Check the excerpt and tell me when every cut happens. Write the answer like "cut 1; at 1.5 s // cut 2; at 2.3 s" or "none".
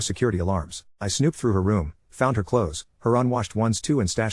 none